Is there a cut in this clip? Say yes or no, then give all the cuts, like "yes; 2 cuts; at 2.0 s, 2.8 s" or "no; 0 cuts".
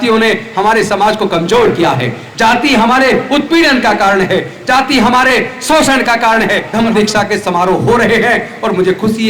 yes; 1 cut; at 6.7 s